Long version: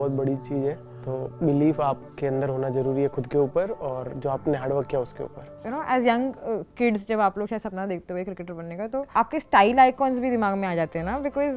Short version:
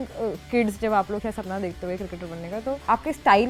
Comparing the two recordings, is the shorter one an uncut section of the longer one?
yes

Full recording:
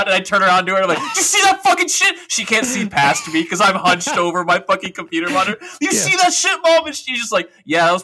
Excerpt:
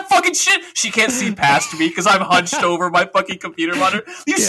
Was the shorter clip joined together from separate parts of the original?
no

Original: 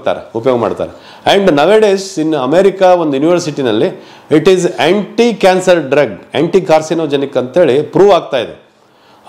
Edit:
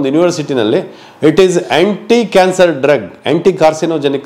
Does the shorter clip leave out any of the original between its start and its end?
no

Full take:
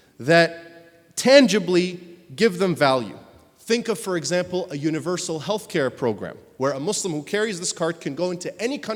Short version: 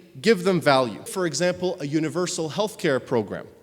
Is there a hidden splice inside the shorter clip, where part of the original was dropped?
yes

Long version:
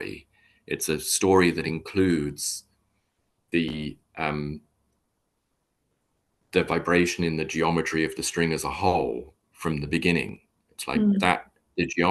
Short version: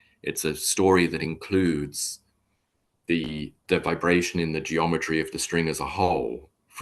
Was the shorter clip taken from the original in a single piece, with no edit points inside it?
no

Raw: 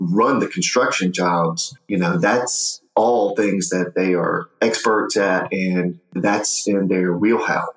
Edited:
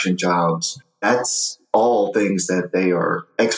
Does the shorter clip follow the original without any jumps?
no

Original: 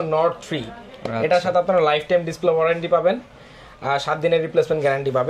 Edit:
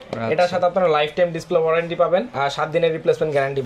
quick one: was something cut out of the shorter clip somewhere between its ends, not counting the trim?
yes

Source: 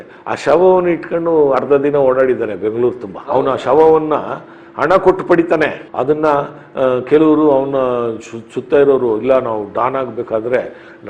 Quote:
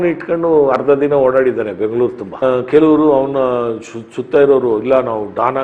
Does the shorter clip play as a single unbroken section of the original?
no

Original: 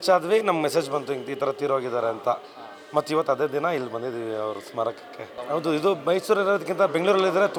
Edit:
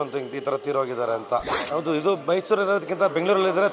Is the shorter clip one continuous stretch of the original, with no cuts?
no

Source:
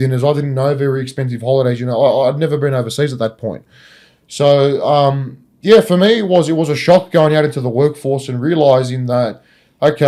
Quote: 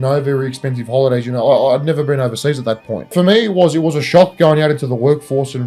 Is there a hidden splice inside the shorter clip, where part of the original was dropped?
yes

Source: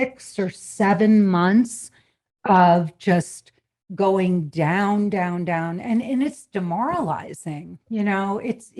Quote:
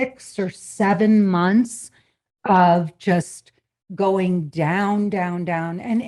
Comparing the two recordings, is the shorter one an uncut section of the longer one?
yes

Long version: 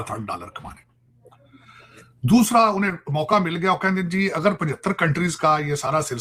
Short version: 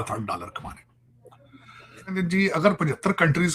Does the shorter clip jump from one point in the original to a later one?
yes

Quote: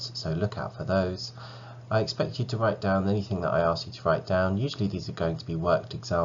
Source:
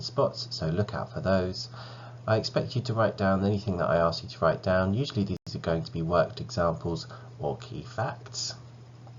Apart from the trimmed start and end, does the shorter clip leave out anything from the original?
yes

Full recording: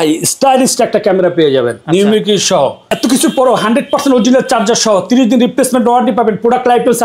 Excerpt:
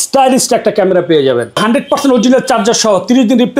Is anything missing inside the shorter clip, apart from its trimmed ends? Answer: yes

